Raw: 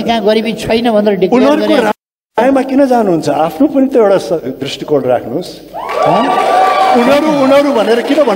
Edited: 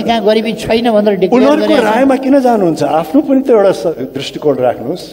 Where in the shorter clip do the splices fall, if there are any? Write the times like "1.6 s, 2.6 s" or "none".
1.9 s